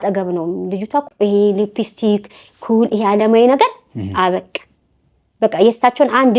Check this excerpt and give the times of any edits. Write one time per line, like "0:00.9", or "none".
0:01.0